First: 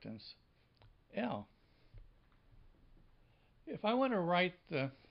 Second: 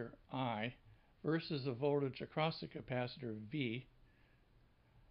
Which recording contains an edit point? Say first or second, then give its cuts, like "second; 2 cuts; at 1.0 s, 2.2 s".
first; 1 cut; at 2.0 s